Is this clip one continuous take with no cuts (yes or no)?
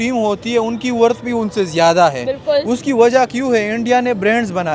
yes